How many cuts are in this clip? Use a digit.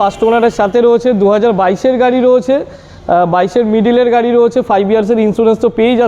0